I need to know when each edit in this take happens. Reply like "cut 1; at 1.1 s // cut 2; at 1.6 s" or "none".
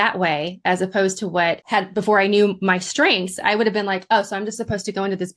cut 1; at 1.6 s